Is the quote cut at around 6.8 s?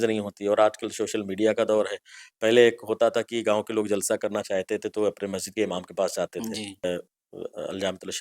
yes; 1 cut; at 6.8 s

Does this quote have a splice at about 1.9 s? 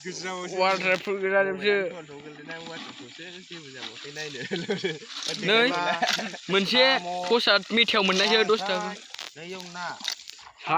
no; 0 cuts

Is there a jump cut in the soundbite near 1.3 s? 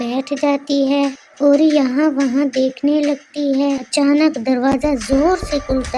no; 1 cut; at 3.8 s

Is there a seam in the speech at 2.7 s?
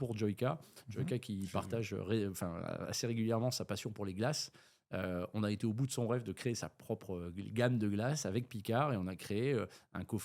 no; 0 cuts

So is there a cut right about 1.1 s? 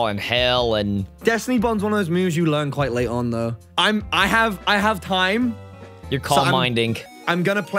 yes; 2 cuts; at 1.1 s, 3.6 s

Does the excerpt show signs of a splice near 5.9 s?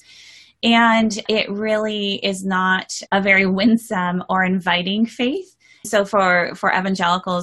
yes; 3 cuts; at 1.2 s, 2.9 s, 5.9 s

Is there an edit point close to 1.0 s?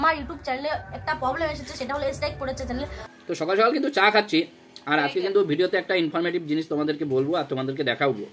no; 1 cut; at 3.0 s

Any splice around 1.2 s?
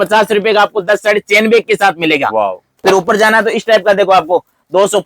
no; 1 cut; at 2.7 s

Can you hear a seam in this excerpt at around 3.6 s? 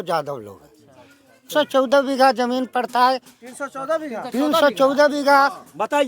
no; 1 cut; at 1.5 s

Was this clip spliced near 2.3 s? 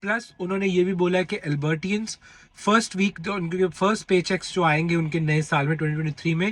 no; 0 cuts

